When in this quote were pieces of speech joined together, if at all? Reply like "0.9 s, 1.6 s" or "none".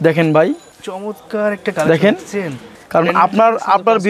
none